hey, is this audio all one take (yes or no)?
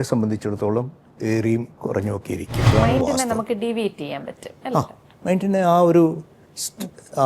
no